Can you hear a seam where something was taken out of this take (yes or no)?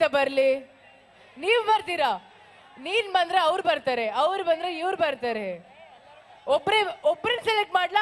no